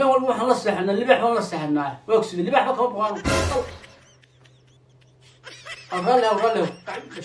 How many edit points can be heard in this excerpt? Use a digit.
0